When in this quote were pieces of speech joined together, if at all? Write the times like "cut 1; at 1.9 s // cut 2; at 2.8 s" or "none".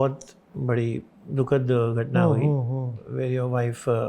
cut 1; at 1.1 s